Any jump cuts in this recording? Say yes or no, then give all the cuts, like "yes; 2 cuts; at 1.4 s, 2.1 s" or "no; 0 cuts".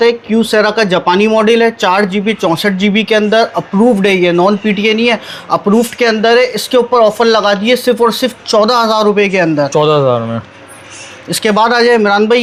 no; 0 cuts